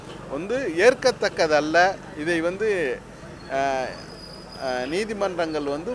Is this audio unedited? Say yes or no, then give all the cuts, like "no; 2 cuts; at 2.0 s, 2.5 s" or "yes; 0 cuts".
yes; 0 cuts